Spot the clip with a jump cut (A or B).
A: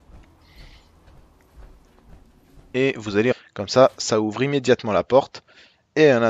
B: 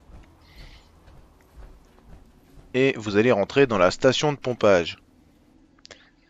B